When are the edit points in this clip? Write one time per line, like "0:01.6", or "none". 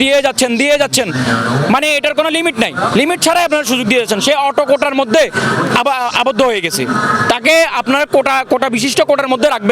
none